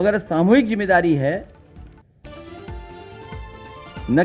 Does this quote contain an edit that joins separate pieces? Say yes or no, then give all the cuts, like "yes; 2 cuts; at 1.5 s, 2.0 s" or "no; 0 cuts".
no; 0 cuts